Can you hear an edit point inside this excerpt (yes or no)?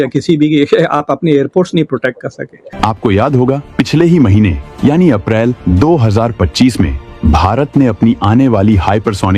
yes